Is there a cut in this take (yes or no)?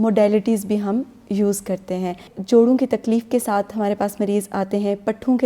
yes